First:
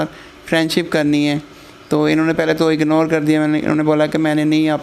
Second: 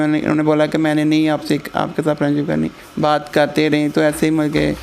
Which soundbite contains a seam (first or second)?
second